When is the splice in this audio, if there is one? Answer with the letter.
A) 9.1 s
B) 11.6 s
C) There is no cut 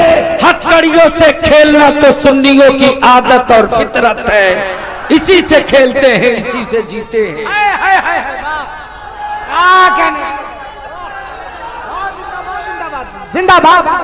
C